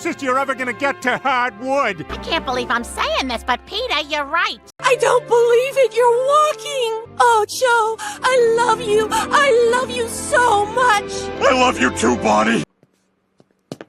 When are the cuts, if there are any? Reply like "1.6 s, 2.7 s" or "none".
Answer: 4.6 s, 12.8 s